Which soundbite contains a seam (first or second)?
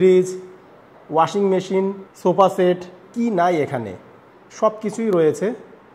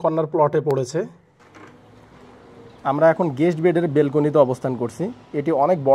second